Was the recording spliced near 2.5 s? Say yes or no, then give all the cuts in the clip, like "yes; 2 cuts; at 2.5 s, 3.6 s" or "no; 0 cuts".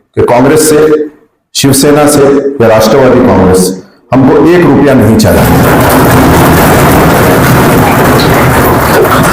no; 1 cut; at 6.9 s